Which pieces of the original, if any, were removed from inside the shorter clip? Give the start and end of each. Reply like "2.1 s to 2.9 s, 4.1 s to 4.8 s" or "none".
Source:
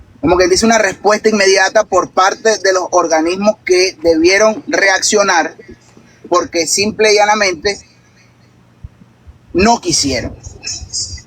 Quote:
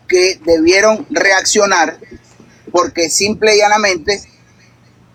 none